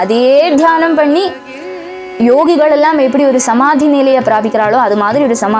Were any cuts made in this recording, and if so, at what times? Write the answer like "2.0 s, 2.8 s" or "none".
none